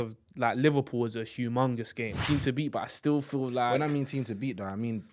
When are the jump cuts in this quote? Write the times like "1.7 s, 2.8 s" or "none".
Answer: 2.2 s